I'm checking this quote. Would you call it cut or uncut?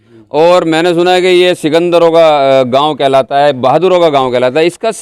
uncut